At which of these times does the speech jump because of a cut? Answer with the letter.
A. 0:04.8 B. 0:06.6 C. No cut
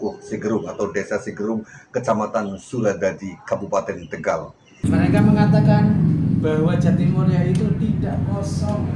A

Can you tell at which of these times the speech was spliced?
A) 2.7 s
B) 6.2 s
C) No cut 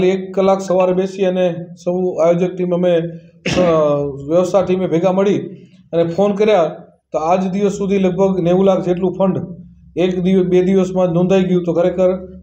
C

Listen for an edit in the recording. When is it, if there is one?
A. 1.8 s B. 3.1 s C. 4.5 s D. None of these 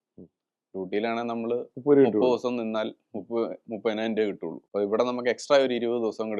C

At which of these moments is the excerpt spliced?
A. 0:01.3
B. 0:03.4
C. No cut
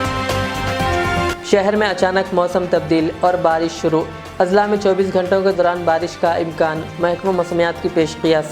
A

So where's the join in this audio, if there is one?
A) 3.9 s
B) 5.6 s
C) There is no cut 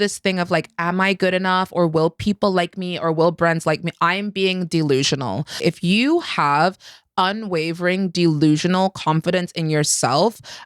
B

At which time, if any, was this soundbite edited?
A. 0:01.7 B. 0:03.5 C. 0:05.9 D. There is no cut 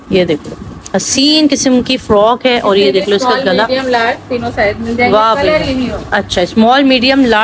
D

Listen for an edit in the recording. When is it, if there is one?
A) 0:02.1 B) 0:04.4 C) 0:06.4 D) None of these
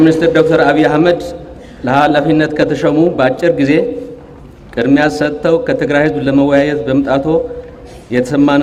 D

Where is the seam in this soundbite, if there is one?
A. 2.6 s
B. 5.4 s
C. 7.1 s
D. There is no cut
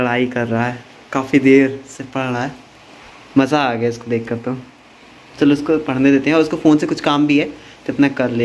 D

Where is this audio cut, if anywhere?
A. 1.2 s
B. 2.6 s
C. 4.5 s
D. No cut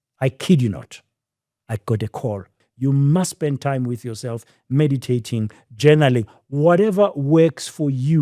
B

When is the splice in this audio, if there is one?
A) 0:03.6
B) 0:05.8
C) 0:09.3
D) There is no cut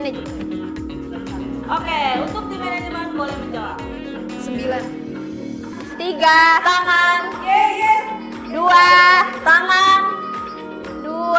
B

